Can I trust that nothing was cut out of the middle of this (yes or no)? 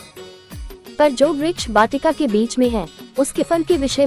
no